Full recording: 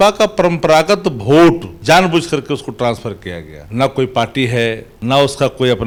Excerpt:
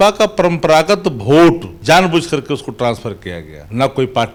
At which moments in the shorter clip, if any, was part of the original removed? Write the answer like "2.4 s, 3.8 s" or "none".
none